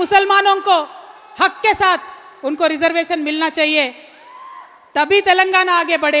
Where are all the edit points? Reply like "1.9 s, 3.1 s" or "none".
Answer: none

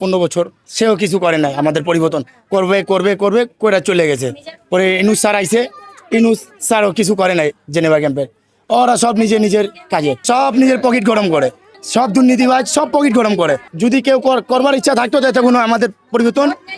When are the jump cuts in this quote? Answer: none

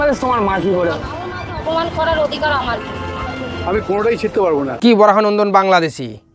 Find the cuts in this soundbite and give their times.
none

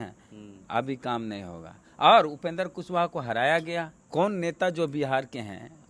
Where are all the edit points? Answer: 4.0 s

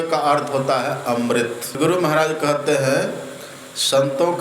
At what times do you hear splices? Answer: 1.8 s

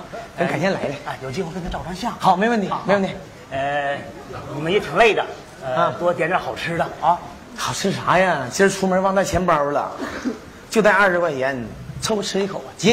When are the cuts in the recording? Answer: 8.2 s

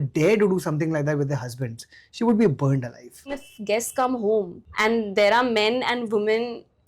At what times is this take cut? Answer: 3.5 s, 4.6 s

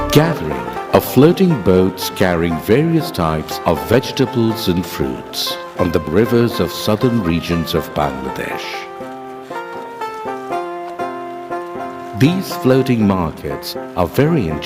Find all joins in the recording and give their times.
none

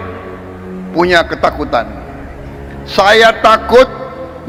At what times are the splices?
none

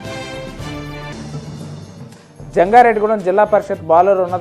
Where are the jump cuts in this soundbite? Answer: 1.1 s

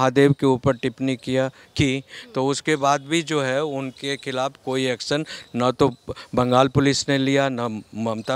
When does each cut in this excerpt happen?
none

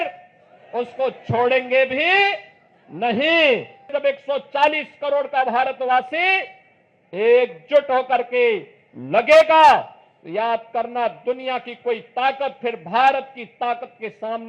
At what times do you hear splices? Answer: 4.0 s

